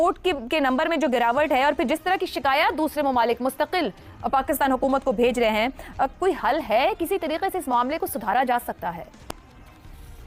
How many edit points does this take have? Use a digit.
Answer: 0